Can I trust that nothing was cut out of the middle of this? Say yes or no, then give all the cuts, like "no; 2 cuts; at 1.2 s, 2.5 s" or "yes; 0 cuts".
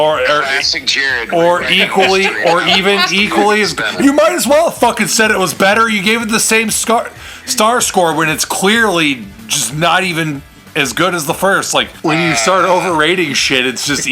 no; 1 cut; at 11.9 s